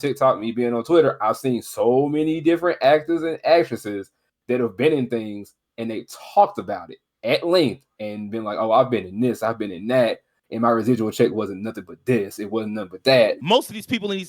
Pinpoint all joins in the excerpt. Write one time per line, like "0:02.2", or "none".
0:13.4